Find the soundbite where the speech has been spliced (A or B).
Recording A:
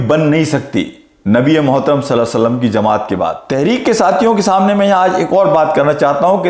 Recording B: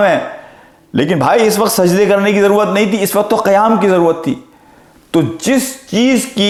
A